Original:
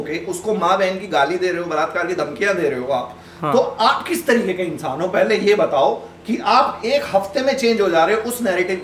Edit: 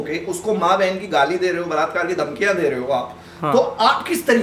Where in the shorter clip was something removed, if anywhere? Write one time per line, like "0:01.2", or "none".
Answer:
none